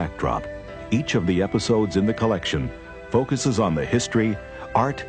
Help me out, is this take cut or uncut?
uncut